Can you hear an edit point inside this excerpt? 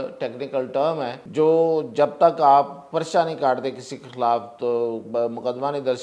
yes; 1 cut; at 1.2 s

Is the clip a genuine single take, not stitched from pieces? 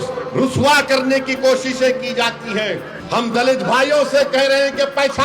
no; 1 cut; at 2.9 s

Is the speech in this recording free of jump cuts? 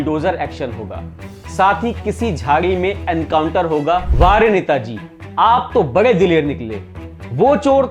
no; 1 cut; at 4.1 s

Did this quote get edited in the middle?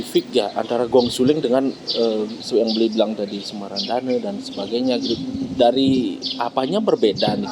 no; 0 cuts

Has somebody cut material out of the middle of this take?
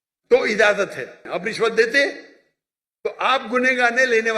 yes; 1 cut; at 1.2 s

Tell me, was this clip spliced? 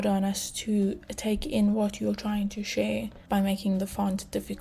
no; 0 cuts

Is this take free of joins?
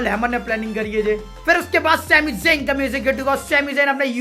no; 1 cut; at 1.3 s

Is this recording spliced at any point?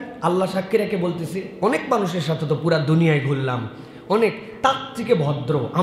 no; 0 cuts

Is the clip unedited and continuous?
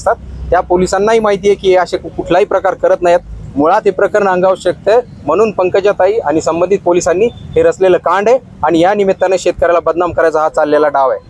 yes; 0 cuts

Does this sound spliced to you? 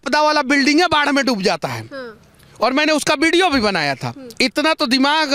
no; 0 cuts

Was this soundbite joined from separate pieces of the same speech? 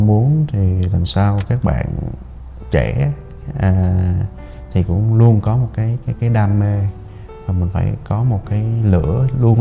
no; 0 cuts

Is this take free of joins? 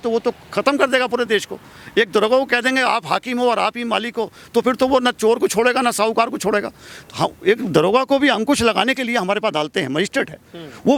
yes; 0 cuts

